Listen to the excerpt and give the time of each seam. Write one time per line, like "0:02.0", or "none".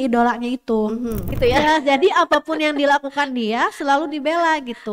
0:01.3